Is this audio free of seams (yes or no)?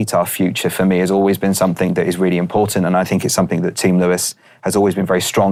yes